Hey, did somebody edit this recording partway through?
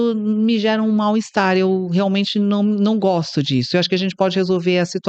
no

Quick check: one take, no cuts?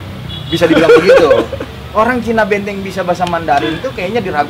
yes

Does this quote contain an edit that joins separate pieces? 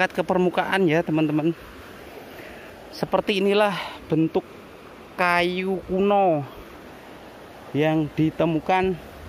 no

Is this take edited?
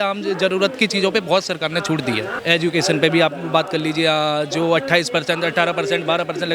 no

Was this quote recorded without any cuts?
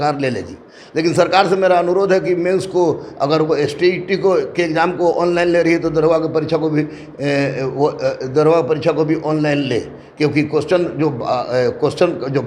yes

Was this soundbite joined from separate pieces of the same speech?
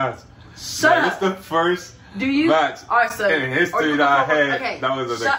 no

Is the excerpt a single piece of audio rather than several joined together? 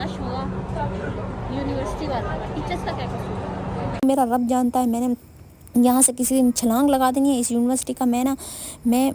no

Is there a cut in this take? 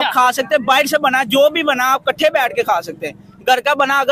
no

